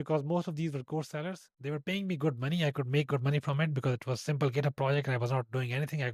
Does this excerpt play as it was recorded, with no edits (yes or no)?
yes